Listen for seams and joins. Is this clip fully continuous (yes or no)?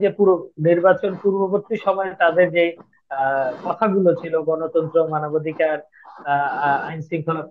yes